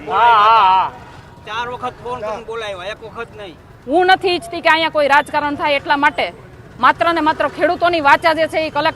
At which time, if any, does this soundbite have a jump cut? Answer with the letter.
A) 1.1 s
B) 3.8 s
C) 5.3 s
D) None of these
D